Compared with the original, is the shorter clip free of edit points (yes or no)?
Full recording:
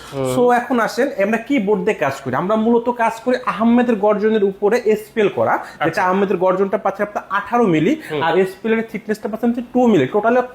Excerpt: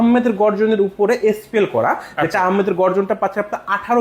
yes